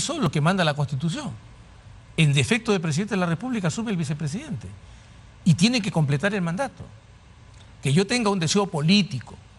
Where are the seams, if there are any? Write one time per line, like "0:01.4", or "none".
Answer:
none